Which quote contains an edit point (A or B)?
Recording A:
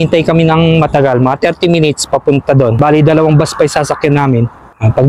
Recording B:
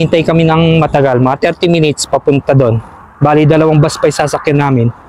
A